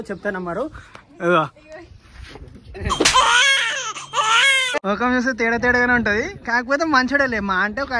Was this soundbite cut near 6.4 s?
no; 1 cut; at 4.8 s

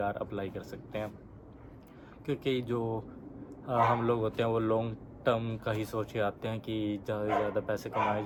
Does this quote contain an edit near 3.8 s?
no; 0 cuts

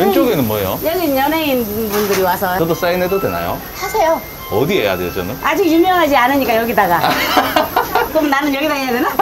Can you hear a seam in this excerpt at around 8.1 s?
yes; 2 cuts; at 2.5 s, 8.1 s

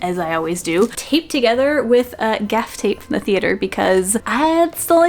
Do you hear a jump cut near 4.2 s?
yes; 2 cuts; at 0.9 s, 4.2 s

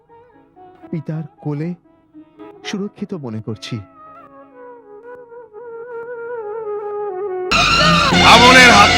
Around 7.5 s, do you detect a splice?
yes; 1 cut; at 7.5 s

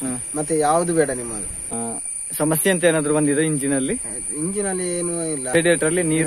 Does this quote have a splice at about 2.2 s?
no; 0 cuts

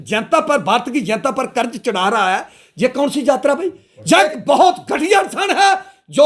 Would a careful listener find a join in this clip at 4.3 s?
yes; 1 cut; at 4.3 s

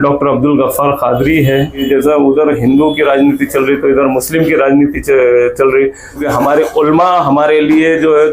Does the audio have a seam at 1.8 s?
yes; 2 cuts; at 1.8 s, 6.2 s

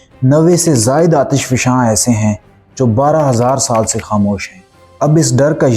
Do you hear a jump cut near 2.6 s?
no; 1 cut; at 4.7 s

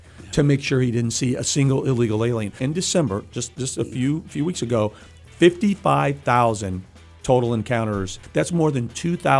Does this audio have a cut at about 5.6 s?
no; 2 cuts; at 2.6 s, 8.2 s

